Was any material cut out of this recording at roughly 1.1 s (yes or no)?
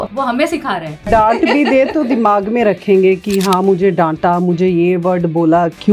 yes